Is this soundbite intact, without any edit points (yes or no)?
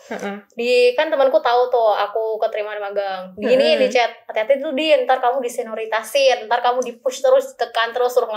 yes